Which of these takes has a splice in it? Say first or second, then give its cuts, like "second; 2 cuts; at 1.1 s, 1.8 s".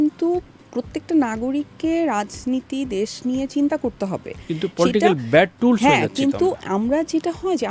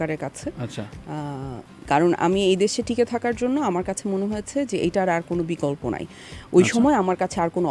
second; 1 cut; at 1.7 s